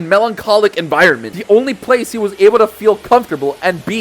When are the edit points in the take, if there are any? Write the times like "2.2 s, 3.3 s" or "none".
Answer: 1.3 s